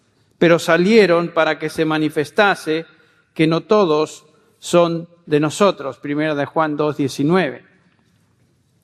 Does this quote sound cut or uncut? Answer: uncut